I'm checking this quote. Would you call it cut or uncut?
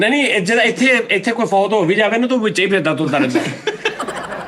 uncut